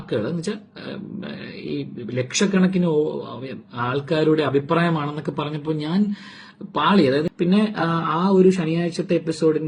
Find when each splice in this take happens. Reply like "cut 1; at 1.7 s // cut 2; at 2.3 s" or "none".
cut 1; at 7.3 s